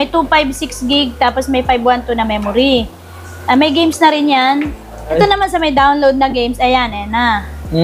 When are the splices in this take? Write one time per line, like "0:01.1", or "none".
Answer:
0:05.1